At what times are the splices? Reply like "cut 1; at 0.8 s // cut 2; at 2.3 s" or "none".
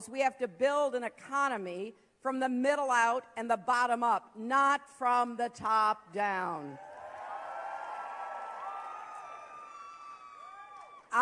none